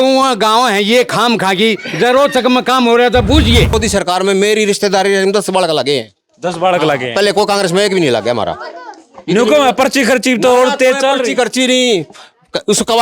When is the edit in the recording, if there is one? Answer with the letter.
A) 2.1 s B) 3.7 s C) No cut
B